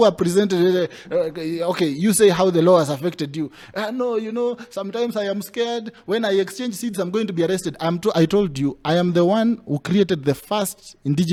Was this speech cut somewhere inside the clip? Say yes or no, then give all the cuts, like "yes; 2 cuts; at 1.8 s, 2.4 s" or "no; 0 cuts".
no; 0 cuts